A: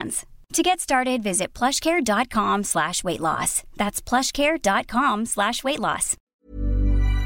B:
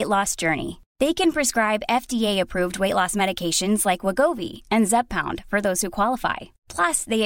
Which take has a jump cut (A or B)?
A